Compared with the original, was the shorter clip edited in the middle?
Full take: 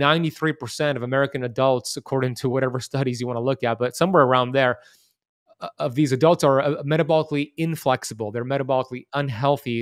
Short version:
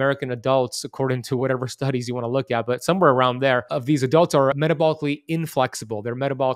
yes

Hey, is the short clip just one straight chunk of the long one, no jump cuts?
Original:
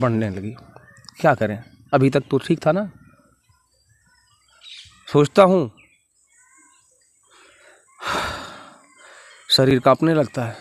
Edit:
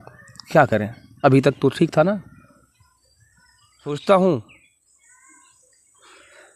no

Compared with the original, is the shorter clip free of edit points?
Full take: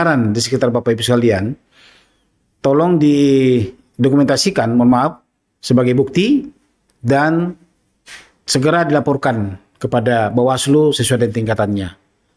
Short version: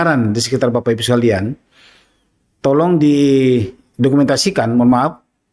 yes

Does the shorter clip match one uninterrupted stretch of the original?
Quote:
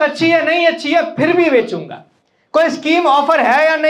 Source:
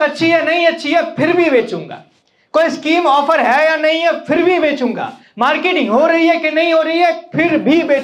yes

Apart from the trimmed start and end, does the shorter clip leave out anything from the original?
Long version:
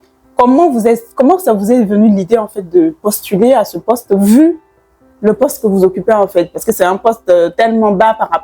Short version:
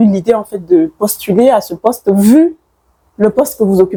no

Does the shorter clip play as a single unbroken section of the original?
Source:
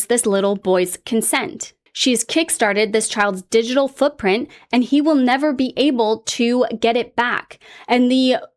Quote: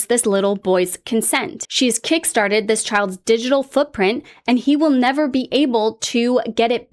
no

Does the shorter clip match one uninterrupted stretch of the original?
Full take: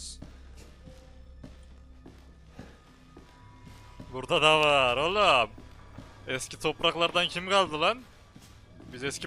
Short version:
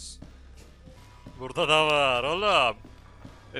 no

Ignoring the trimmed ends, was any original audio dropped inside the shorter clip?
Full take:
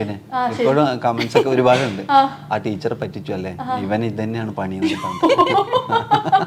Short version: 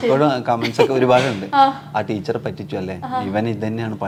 no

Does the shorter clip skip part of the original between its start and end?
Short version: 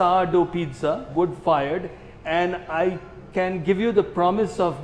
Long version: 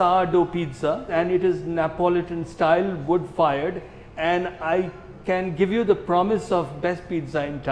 yes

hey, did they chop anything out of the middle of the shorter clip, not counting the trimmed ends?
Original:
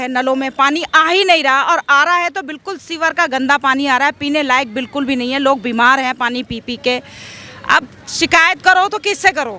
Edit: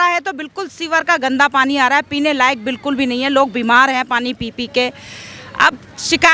no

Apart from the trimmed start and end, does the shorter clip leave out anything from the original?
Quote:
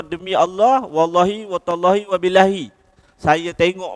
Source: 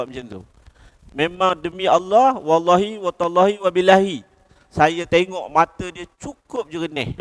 no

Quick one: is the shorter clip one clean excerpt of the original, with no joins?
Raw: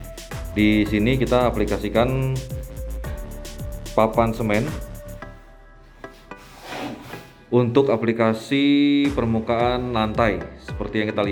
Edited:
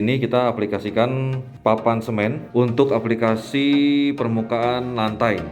no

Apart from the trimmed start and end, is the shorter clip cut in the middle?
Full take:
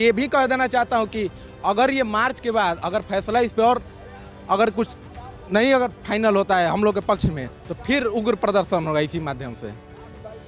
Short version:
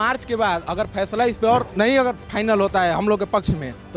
yes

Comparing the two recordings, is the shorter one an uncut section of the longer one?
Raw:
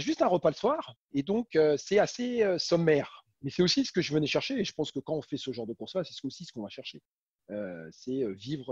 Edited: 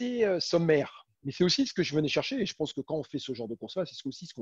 yes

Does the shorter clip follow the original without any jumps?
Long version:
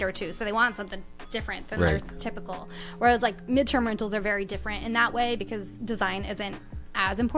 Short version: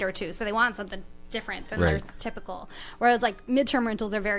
yes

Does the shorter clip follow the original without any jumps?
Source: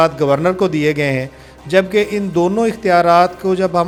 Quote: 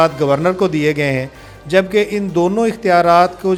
yes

